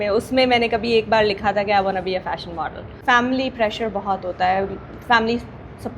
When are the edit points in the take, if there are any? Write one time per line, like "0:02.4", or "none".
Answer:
0:02.9